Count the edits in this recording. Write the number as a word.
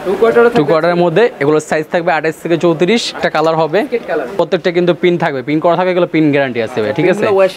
two